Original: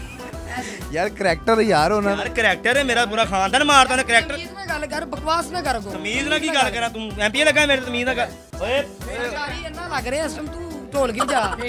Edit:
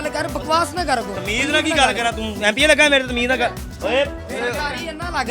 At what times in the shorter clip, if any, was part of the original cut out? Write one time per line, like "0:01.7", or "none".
none